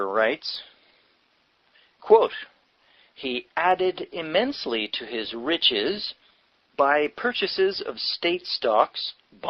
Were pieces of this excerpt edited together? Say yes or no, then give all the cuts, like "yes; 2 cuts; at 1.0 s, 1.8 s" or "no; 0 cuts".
no; 0 cuts